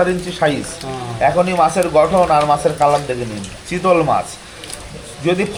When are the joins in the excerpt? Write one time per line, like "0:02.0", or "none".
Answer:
none